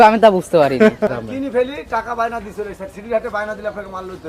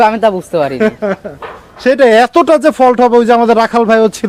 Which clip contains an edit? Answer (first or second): first